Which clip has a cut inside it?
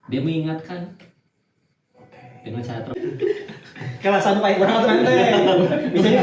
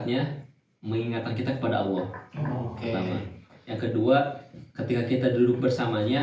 first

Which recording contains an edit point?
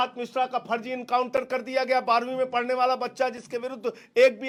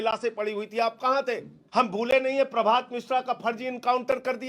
second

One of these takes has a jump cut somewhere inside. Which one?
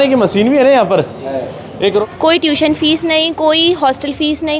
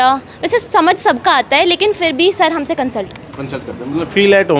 first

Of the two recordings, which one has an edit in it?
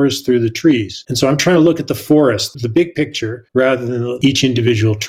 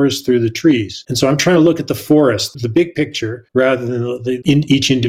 first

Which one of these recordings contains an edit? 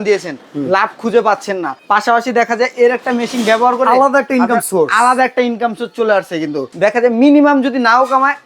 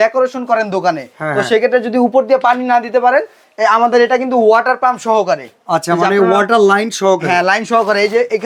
first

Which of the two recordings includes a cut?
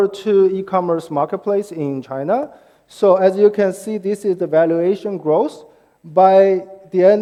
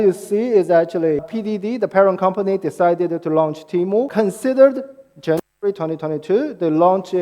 second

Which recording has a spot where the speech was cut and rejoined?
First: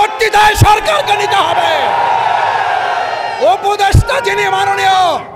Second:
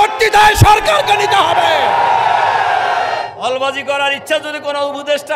second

